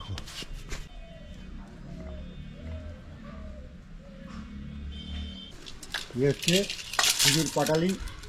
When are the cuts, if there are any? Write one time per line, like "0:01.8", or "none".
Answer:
0:00.8
0:05.7